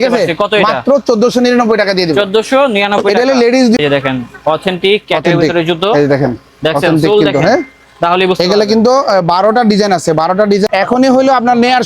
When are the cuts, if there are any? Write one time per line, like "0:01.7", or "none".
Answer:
0:03.8
0:10.7